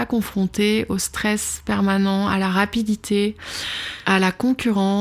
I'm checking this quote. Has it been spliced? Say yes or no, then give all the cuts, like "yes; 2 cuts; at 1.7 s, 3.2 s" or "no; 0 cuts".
yes; 1 cut; at 3.9 s